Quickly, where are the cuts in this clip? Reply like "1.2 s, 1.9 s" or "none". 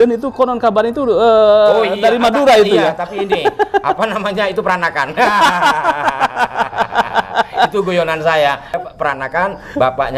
8.7 s